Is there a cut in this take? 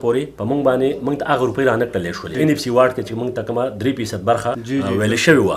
no; 0 cuts

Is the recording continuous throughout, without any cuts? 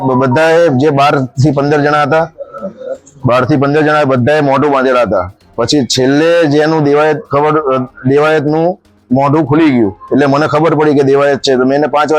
yes; 0 cuts

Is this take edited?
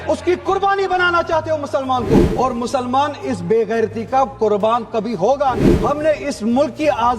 yes; 2 cuts; at 2.3 s, 5.7 s

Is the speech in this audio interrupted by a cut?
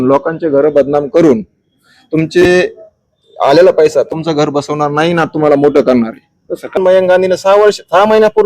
yes; 1 cut; at 6.8 s

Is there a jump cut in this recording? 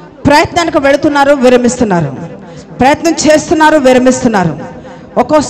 no; 0 cuts

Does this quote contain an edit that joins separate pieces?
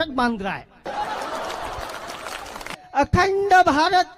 yes; 1 cut; at 2.7 s

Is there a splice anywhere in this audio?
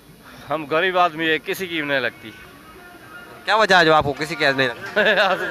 no; 0 cuts

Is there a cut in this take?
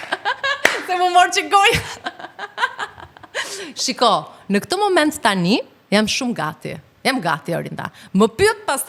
no; 0 cuts

